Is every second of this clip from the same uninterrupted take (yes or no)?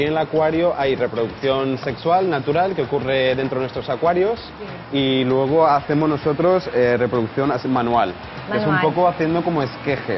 yes